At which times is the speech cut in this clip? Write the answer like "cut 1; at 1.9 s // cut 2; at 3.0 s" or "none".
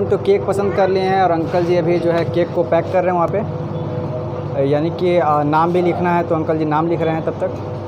none